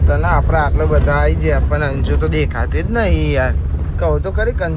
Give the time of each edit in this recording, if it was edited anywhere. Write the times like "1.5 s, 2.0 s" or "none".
none

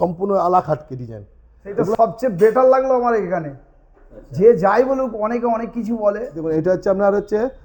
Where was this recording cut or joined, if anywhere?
1.9 s, 6.4 s

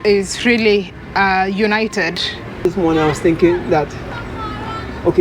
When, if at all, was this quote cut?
2.7 s

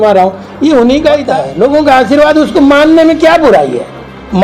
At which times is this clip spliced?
1.4 s

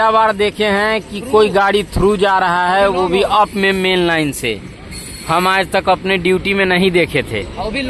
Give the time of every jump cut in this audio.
none

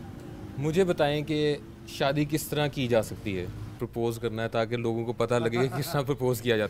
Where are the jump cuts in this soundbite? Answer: 3.8 s

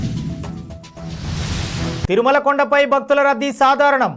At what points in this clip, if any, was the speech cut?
1.9 s

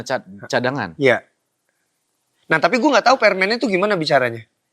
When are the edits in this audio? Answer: none

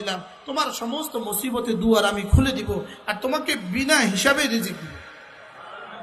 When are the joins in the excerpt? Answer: none

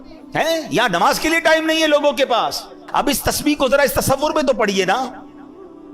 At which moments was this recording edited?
2.8 s

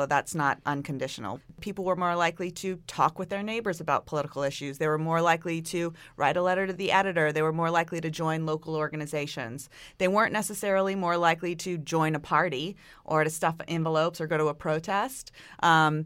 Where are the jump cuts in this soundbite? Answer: 1.6 s

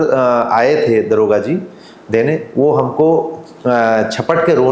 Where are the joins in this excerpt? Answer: none

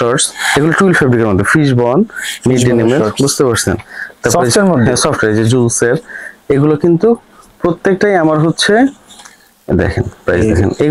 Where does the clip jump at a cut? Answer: none

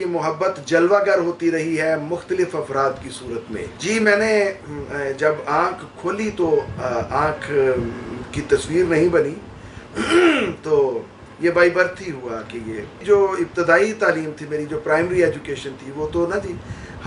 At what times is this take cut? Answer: none

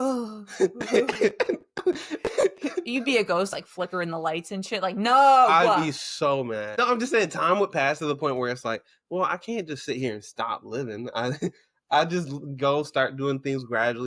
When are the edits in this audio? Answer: 6.8 s

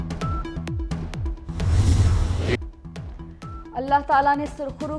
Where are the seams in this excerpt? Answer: 1.2 s

